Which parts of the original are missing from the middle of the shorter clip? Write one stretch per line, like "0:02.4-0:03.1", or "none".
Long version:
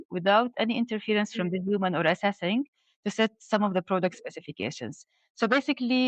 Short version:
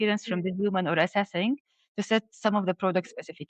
none